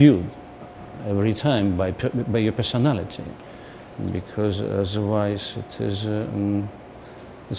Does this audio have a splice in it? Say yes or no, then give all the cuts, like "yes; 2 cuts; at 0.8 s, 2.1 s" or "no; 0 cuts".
no; 0 cuts